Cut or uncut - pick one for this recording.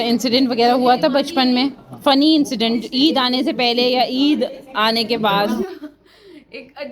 cut